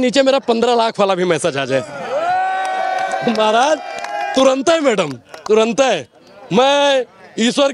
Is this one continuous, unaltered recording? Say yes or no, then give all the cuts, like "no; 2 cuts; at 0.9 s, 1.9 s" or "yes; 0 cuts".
yes; 0 cuts